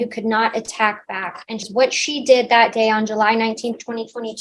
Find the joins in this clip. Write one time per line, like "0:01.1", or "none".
0:01.6